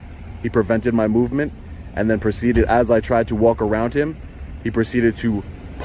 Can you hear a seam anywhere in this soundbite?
no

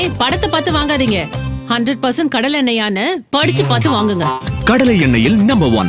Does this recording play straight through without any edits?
yes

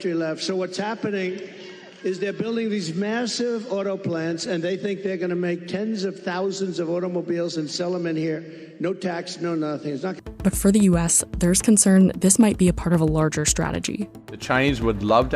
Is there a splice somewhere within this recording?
yes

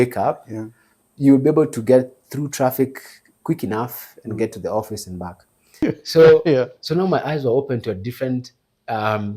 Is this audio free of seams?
no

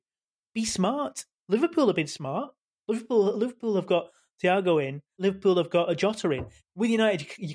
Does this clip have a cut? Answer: yes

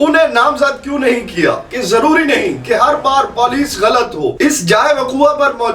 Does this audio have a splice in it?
yes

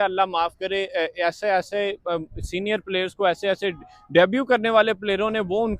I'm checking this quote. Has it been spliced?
no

